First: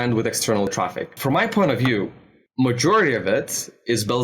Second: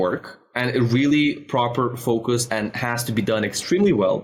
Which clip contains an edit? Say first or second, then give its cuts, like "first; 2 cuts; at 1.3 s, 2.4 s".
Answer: first; 1 cut; at 1.1 s